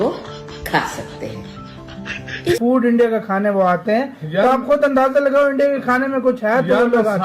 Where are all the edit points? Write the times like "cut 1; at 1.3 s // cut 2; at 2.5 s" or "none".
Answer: cut 1; at 2.6 s